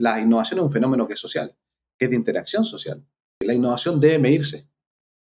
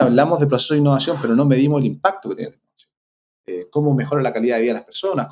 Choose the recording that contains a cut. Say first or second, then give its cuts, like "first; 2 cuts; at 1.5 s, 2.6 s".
first; 1 cut; at 3.4 s